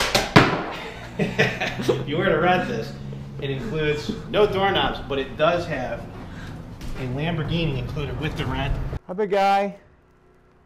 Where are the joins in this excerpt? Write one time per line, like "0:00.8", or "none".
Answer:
0:08.9